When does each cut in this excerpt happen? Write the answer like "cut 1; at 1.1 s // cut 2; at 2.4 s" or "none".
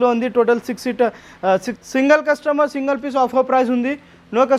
cut 1; at 1.7 s